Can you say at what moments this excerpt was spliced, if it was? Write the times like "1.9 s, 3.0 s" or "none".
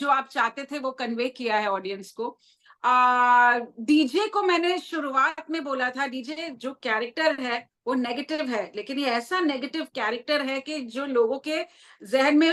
none